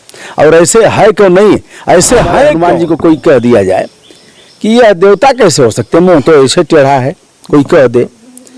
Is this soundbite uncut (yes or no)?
no